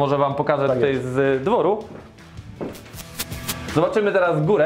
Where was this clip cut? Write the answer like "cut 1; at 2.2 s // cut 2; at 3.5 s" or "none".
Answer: cut 1; at 3.4 s